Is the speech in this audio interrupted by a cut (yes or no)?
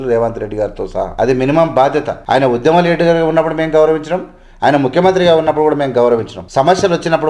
yes